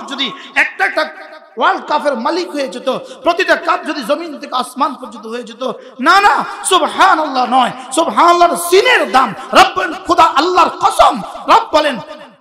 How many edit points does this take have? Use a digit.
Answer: 0